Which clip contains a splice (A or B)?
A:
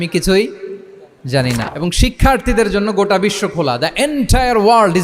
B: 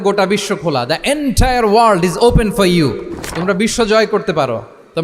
A